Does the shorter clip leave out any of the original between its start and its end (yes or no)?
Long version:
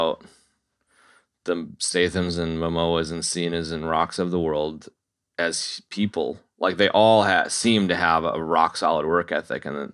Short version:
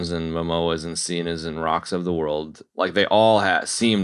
yes